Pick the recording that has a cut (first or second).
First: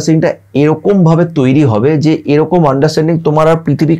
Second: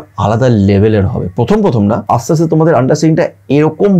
second